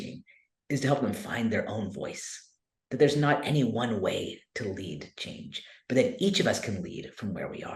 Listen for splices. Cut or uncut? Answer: uncut